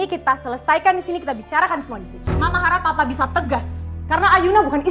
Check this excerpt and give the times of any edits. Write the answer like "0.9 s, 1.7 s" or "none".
2.2 s